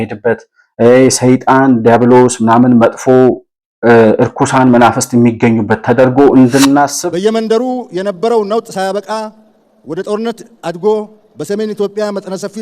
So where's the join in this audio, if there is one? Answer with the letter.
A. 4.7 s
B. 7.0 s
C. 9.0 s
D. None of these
B